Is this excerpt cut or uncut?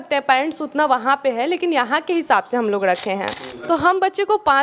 cut